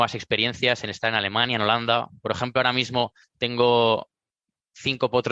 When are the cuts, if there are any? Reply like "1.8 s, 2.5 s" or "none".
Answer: 3.3 s